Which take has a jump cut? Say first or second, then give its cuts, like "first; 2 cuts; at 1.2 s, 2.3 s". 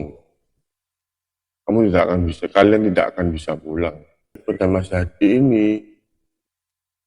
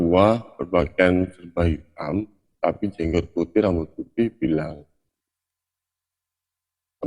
first; 1 cut; at 4.4 s